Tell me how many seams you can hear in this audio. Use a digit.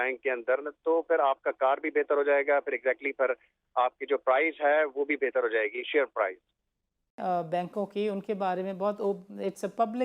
1